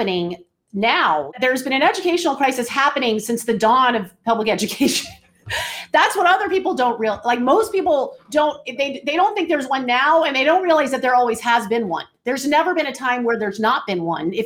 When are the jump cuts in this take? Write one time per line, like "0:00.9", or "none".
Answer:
0:01.3